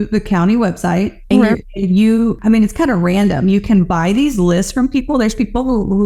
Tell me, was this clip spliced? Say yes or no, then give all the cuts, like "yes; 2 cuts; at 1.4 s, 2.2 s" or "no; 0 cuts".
no; 0 cuts